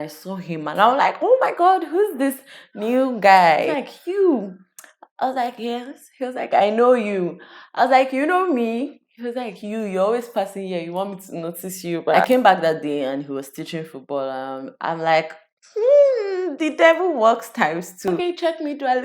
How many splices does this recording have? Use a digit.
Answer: 3